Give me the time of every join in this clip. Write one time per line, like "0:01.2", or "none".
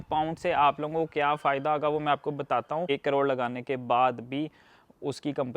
0:02.9